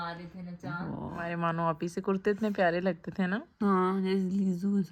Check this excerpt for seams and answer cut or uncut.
uncut